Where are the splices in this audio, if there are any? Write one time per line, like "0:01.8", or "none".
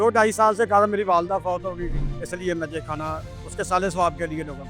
0:02.1

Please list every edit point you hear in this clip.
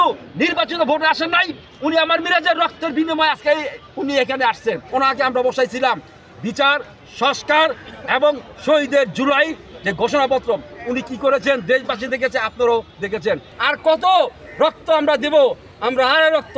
0:04.8
0:13.5

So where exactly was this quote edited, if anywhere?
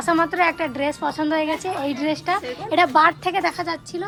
none

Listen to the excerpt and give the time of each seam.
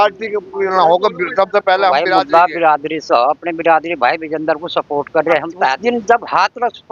0:02.1
0:05.8

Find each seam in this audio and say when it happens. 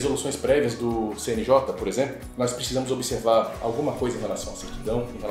0:02.2

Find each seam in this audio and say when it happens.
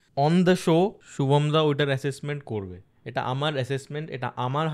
0:01.1

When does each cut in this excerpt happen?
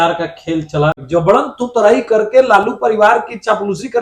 0:01.0

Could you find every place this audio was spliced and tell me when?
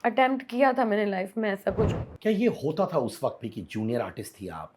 0:01.9

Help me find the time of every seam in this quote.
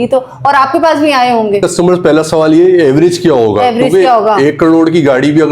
0:01.7

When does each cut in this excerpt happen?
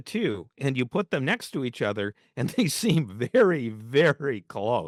none

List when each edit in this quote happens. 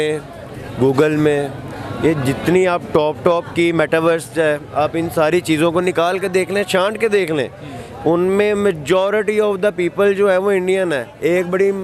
none

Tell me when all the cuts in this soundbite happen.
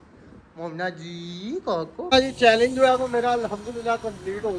0:02.1

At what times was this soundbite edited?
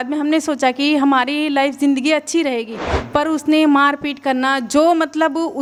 none

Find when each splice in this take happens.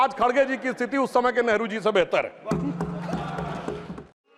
none

